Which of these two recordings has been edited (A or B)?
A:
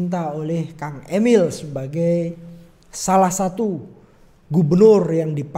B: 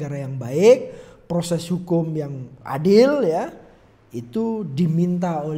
B